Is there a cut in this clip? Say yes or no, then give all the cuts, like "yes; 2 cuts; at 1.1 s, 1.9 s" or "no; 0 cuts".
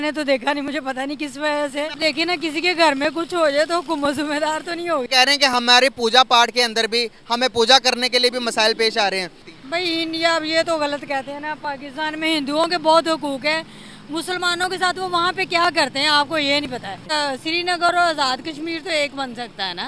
yes; 4 cuts; at 1.9 s, 5.1 s, 9.5 s, 17.0 s